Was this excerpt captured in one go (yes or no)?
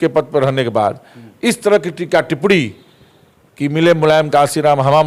yes